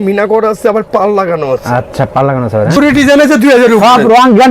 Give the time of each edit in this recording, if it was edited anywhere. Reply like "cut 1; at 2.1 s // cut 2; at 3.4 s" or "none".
cut 1; at 2.8 s